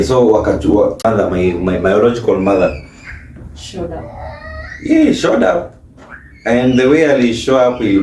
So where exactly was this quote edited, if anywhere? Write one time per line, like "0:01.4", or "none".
0:01.0